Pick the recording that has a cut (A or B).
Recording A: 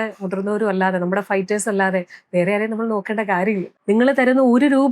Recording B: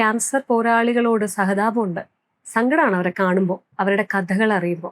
A